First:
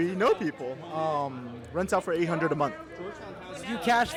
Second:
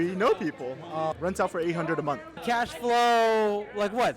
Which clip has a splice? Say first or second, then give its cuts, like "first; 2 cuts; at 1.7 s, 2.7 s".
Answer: second; 2 cuts; at 1.1 s, 2.4 s